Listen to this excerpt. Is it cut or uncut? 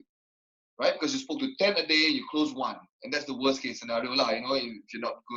uncut